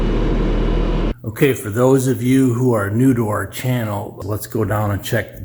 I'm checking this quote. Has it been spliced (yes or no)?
yes